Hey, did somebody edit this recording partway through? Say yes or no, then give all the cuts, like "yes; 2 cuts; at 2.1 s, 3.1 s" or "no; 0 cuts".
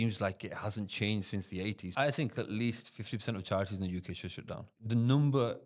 yes; 2 cuts; at 1.9 s, 4.7 s